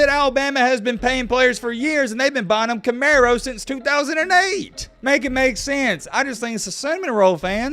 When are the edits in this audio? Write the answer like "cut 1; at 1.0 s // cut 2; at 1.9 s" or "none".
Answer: cut 1; at 4.8 s